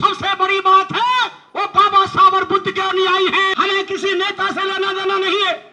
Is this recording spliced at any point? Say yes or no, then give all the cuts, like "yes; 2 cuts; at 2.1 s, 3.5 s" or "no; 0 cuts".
yes; 1 cut; at 3.5 s